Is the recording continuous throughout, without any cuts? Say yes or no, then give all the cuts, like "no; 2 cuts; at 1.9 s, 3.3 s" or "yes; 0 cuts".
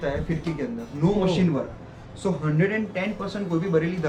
yes; 0 cuts